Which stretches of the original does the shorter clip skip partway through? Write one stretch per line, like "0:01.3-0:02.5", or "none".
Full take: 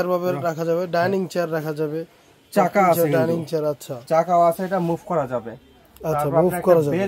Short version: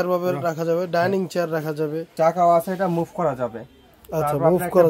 0:02.0-0:04.0